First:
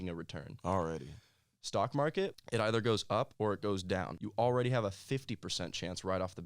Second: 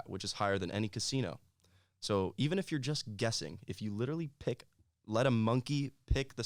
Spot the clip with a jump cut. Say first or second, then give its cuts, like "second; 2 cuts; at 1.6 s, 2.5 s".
first; 3 cuts; at 2.4 s, 3.3 s, 4.2 s